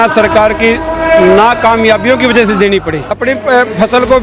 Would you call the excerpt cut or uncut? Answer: cut